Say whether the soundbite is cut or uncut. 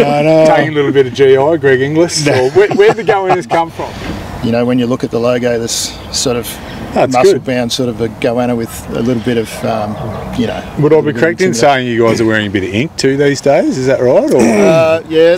cut